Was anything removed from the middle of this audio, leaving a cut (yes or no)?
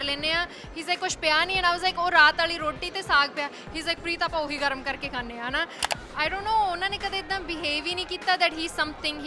yes